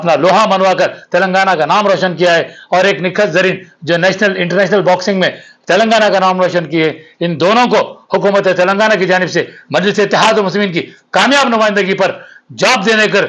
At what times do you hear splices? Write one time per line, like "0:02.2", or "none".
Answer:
none